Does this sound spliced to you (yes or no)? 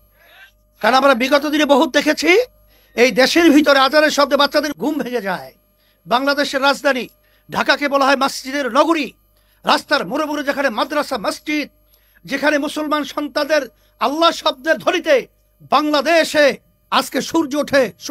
yes